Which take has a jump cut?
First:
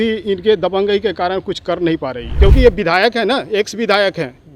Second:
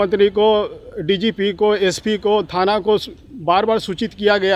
first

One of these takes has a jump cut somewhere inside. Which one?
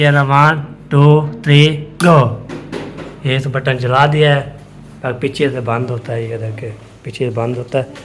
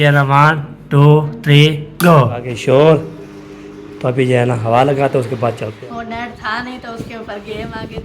second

